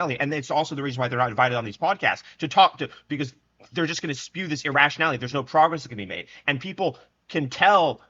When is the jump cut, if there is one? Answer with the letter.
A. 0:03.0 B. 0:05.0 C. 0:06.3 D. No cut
D